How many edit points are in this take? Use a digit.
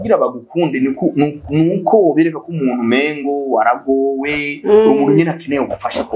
0